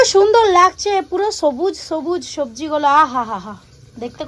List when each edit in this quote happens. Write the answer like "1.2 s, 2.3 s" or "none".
none

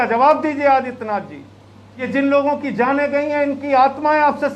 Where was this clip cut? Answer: 2.1 s

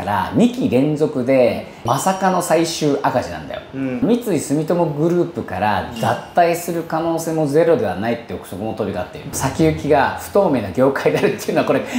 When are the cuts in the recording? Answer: 4.0 s, 9.2 s

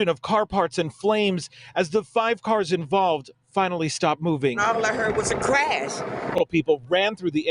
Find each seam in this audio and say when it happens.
6.4 s

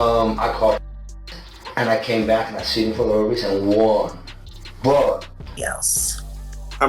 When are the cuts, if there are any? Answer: 5.6 s

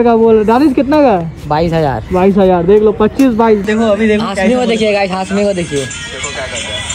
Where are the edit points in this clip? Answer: 3.6 s

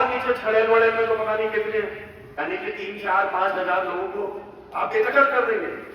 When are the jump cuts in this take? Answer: 2.3 s

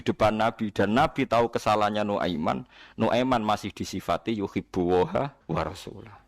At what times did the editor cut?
5.4 s

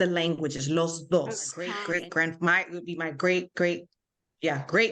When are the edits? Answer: 1.8 s

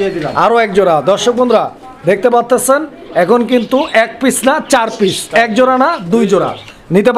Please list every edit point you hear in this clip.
none

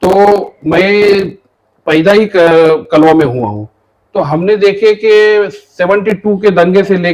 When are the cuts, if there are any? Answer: none

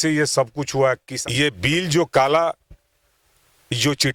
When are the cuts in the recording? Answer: 1.1 s

